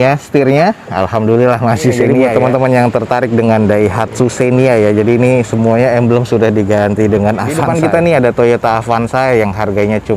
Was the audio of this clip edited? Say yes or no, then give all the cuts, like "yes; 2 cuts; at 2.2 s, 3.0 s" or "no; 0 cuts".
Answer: yes; 2 cuts; at 2.1 s, 7.6 s